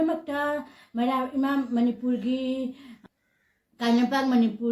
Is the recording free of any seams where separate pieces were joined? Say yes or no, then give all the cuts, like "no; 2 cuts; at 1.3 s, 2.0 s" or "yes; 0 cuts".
no; 1 cut; at 3.0 s